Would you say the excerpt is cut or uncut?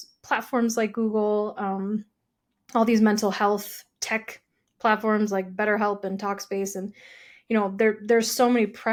uncut